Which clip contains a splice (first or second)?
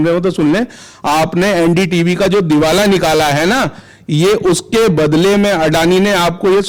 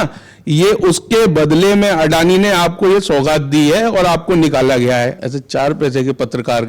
second